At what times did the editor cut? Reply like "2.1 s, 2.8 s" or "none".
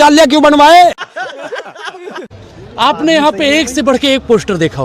1.0 s, 2.4 s